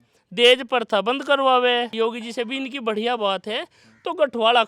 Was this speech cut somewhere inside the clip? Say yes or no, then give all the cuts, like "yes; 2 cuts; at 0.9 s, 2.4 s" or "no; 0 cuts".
yes; 1 cut; at 1.9 s